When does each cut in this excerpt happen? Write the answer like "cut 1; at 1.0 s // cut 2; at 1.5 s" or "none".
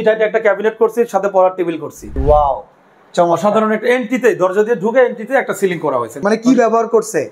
cut 1; at 2.1 s // cut 2; at 6.2 s